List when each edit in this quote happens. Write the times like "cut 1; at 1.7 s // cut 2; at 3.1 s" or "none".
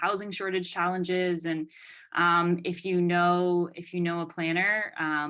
none